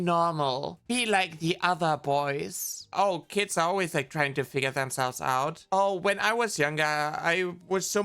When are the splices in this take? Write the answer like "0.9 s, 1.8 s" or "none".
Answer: 2.9 s, 5.6 s